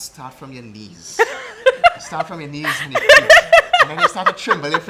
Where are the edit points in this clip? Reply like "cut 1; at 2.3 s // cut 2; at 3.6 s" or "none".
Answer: none